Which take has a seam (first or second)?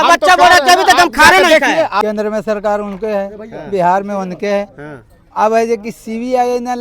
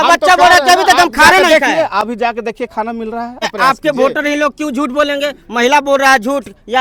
first